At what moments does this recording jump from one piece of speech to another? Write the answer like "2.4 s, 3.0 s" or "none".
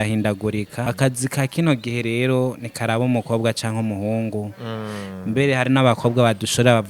0.9 s